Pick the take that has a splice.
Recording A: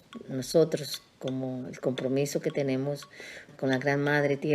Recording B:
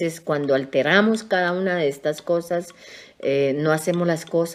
A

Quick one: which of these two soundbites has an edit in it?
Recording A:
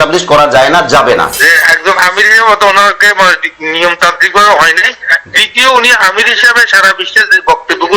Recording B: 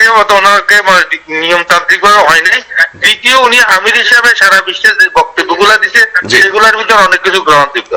A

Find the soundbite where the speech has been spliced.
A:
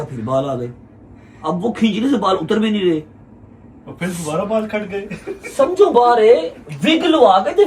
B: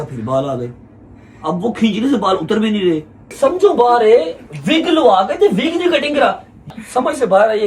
B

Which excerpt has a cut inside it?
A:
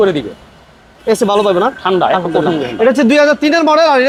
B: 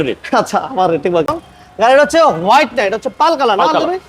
B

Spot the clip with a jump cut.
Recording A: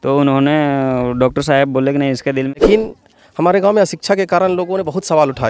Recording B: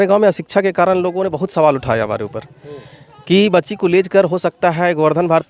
A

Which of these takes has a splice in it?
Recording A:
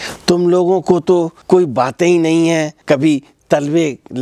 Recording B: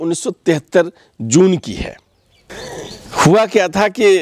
A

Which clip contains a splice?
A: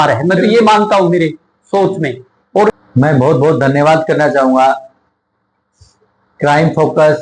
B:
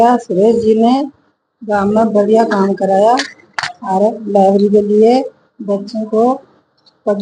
A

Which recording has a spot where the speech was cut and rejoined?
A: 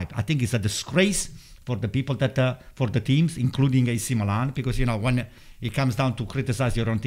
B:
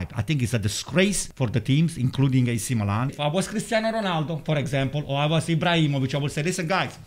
B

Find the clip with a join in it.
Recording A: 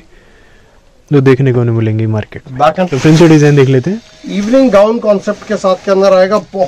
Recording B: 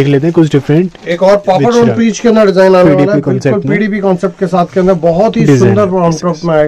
A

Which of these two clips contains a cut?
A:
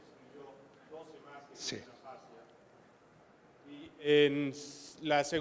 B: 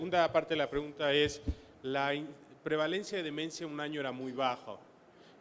B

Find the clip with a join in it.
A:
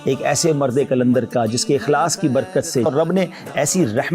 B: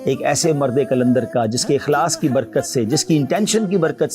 A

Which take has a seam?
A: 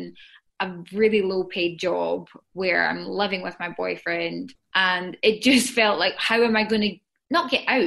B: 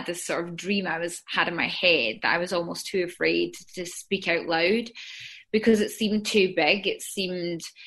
A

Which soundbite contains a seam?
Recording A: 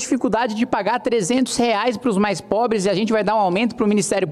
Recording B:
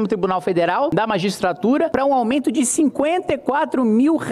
B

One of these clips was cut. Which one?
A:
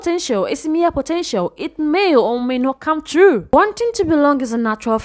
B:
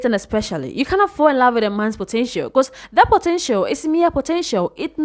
A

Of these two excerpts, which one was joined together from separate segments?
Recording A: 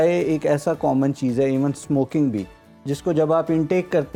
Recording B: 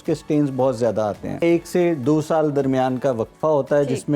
B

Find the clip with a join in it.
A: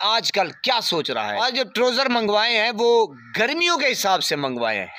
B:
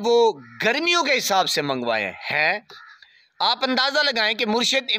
A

